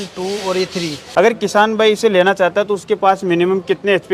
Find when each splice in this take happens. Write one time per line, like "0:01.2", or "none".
0:01.1